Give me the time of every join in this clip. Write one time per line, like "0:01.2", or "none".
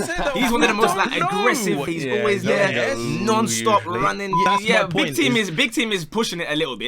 0:01.9
0:04.5